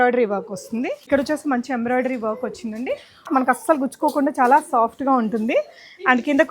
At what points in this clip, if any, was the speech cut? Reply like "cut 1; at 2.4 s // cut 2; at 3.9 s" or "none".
cut 1; at 1.1 s // cut 2; at 3.3 s